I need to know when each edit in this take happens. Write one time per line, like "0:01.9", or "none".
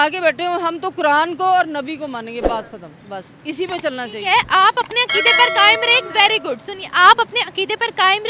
none

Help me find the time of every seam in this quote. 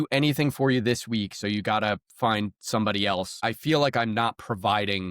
0:03.4

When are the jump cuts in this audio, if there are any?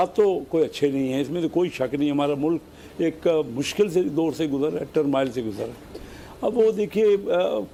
none

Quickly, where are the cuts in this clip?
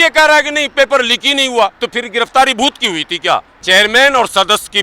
0:03.5

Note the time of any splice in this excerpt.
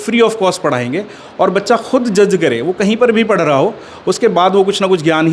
none

